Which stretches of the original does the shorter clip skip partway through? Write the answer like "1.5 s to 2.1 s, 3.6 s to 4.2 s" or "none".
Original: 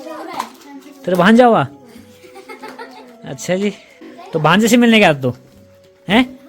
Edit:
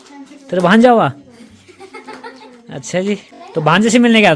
3.9 s to 4.1 s